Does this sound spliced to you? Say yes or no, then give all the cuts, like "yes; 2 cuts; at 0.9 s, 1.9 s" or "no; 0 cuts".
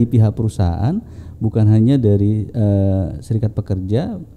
no; 0 cuts